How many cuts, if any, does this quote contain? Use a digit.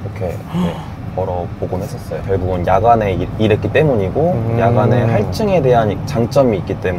0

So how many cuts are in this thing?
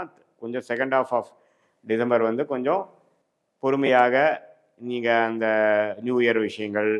0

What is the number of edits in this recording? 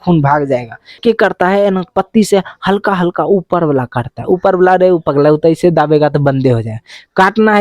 1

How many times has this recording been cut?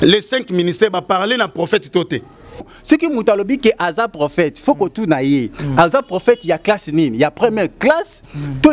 1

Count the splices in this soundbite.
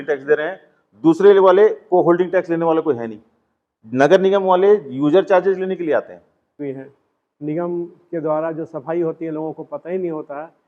1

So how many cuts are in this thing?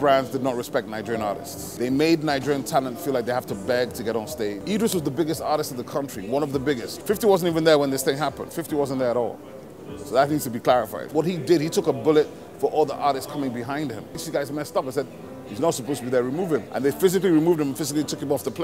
6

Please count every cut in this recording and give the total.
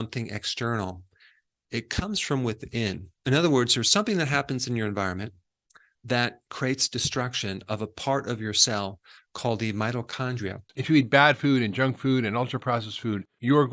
1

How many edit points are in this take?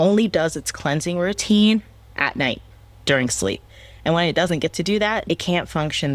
1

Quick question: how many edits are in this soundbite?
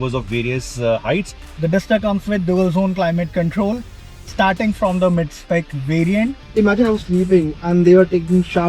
2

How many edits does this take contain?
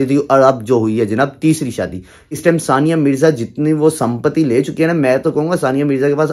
1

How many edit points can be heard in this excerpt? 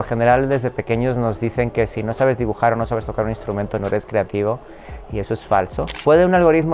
1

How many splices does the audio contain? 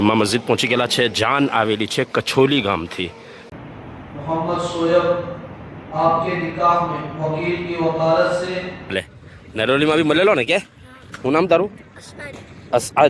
2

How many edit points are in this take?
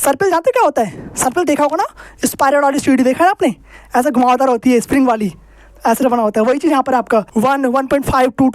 1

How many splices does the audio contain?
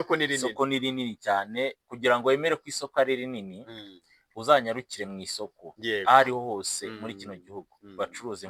0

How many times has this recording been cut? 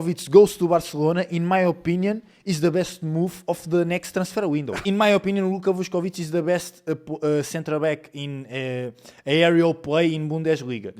1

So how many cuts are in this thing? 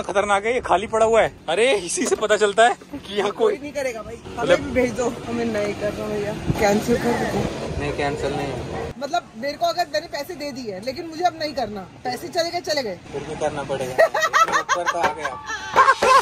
3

